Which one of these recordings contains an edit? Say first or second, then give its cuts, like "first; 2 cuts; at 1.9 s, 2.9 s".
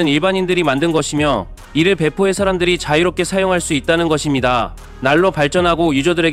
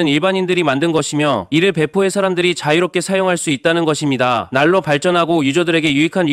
second; 2 cuts; at 1.4 s, 4.5 s